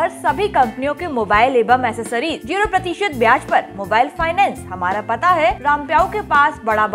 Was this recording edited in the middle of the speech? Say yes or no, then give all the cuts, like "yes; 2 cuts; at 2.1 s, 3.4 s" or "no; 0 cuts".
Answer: yes; 2 cuts; at 2.4 s, 5.6 s